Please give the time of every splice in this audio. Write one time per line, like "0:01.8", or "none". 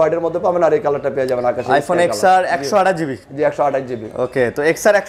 none